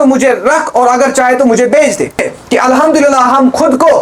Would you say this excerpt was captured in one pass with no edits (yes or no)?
no